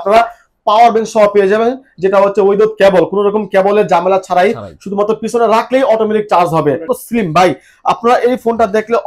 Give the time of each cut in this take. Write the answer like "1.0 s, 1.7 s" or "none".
6.9 s